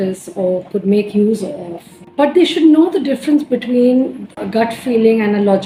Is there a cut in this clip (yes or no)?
no